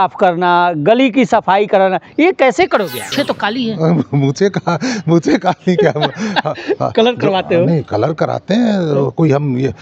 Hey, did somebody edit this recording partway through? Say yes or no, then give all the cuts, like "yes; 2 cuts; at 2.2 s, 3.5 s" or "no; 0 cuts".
yes; 1 cut; at 3.1 s